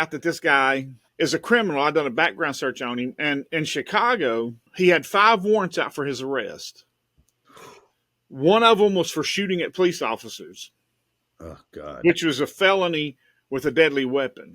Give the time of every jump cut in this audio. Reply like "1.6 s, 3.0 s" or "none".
1.0 s, 4.6 s